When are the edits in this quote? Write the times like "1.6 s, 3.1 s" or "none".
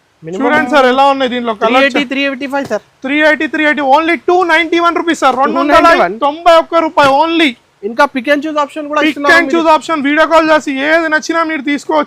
none